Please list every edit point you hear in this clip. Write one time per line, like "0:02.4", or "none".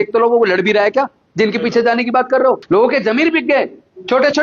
0:02.6